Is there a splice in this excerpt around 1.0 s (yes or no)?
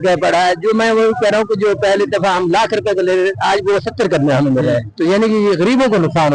no